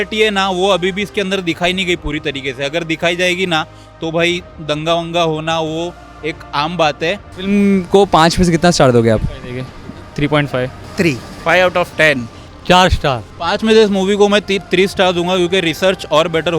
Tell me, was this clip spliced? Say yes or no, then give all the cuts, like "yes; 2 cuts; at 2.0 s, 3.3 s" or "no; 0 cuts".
yes; 2 cuts; at 7.3 s, 13.3 s